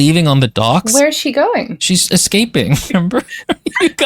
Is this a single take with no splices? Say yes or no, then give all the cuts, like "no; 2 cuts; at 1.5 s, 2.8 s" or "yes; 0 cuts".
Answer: no; 3 cuts; at 0.9 s, 1.9 s, 2.9 s